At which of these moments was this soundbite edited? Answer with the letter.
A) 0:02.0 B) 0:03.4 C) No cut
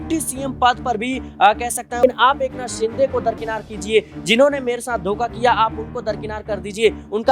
A